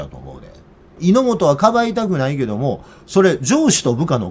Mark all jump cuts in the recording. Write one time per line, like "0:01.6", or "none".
0:01.0